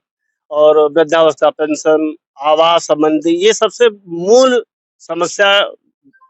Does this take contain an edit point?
no; 0 cuts

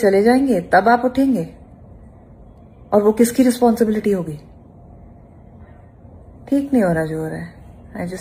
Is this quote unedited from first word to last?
yes; 0 cuts

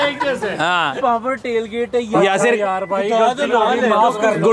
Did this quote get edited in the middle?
yes; 1 cut; at 0.9 s

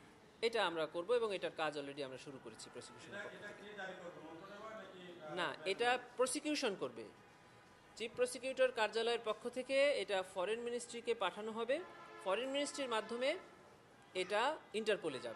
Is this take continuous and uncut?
no; 1 cut; at 3.8 s

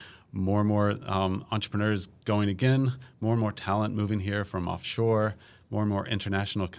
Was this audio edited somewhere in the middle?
no; 0 cuts

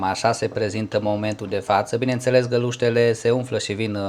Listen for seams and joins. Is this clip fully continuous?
yes; 0 cuts

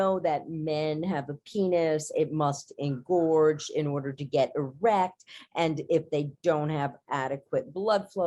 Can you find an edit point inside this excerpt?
no; 0 cuts

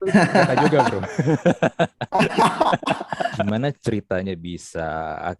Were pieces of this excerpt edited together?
yes; 1 cut; at 3.4 s

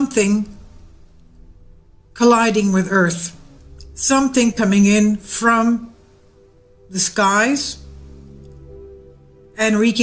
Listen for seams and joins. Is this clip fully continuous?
yes; 0 cuts

